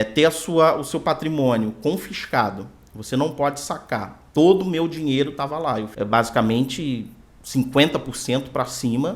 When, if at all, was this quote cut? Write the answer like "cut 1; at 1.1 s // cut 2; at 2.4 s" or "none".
cut 1; at 5.9 s